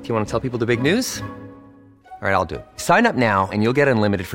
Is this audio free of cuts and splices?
yes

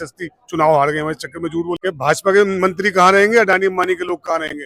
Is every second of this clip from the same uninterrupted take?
no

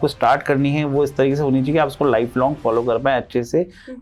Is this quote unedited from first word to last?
yes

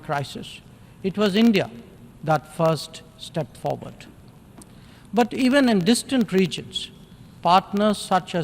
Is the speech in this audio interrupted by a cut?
no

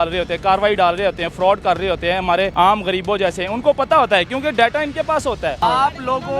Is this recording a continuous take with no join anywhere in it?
no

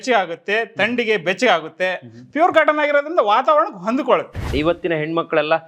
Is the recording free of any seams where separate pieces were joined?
no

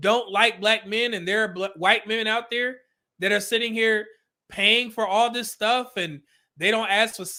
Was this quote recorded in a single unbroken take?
yes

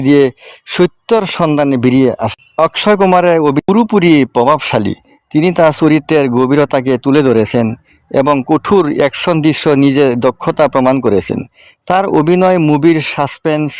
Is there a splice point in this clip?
yes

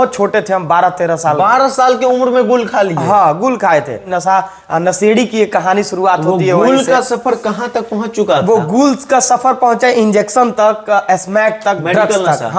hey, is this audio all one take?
no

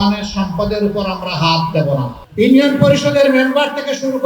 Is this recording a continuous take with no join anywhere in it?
no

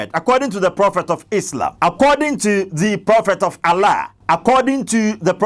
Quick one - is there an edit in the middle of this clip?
yes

